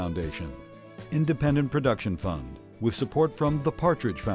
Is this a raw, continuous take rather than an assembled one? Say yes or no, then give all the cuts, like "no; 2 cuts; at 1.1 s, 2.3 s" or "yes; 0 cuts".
yes; 0 cuts